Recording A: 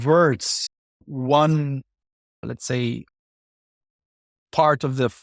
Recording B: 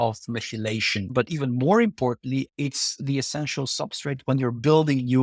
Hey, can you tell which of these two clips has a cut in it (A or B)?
B